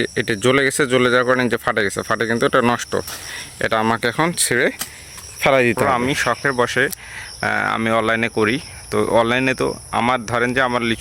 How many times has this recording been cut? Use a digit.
1